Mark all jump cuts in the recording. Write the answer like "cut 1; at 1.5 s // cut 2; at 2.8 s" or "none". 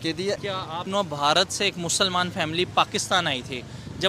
cut 1; at 0.9 s